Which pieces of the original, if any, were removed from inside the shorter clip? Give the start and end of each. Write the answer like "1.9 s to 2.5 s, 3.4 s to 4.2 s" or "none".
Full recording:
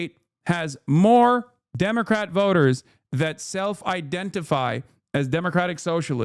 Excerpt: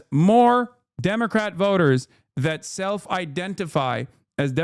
none